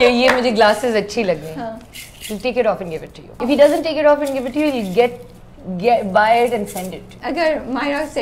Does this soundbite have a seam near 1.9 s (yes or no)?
no